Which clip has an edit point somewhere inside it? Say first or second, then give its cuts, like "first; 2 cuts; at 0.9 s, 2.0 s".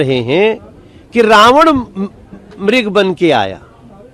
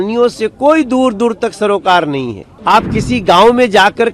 second; 1 cut; at 2.4 s